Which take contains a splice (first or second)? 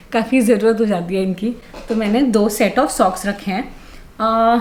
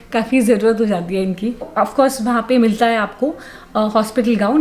second